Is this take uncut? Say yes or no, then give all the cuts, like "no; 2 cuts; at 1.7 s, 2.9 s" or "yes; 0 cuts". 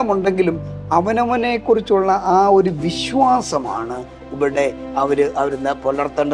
yes; 0 cuts